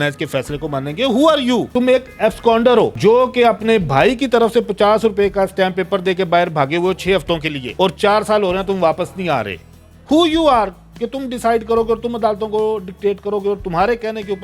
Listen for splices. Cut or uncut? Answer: uncut